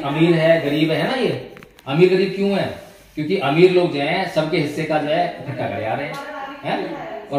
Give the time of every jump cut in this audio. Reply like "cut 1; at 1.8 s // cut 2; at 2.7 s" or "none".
none